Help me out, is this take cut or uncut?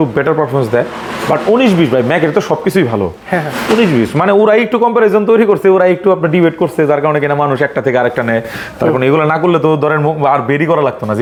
uncut